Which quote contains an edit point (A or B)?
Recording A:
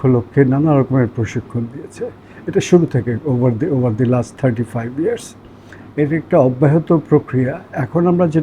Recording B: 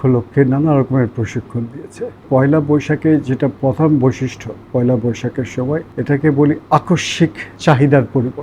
B